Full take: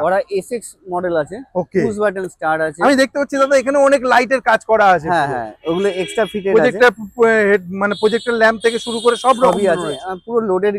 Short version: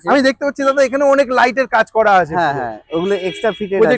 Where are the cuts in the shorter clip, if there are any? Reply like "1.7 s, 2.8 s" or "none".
none